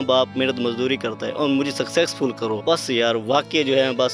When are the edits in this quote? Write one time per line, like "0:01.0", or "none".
0:02.6